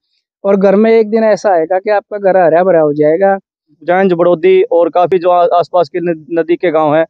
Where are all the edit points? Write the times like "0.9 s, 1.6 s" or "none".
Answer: 3.7 s